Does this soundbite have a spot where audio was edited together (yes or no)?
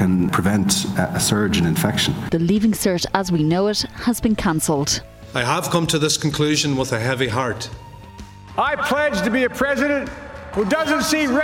yes